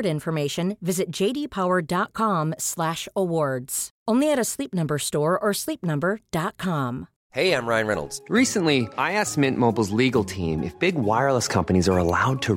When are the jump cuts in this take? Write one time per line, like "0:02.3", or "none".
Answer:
0:07.1